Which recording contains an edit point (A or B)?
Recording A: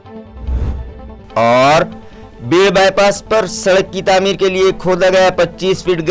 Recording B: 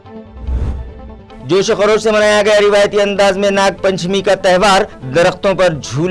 A